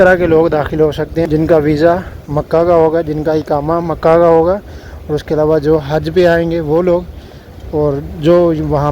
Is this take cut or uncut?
cut